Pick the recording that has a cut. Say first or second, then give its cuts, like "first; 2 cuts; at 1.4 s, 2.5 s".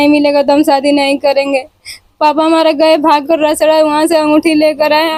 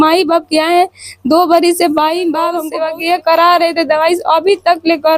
second; 1 cut; at 2.6 s